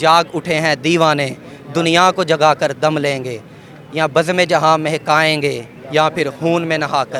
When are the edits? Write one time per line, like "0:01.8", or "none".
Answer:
none